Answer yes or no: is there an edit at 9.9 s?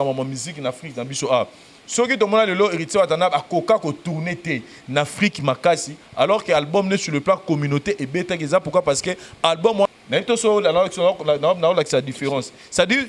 yes